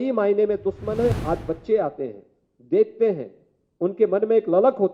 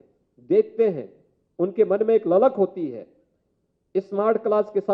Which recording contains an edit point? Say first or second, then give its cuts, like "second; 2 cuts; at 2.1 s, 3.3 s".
first; 1 cut; at 1.1 s